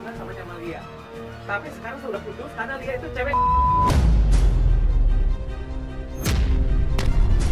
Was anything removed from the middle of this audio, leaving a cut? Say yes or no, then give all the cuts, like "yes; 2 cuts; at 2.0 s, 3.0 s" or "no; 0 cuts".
no; 0 cuts